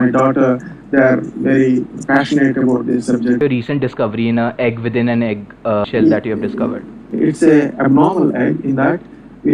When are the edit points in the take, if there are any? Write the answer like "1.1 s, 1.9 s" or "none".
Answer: 3.4 s, 5.8 s, 7.0 s